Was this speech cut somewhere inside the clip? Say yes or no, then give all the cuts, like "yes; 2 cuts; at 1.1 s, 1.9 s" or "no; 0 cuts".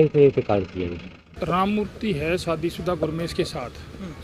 yes; 1 cut; at 1.2 s